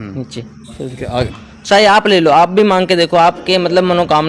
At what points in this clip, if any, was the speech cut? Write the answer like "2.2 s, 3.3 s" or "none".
1.3 s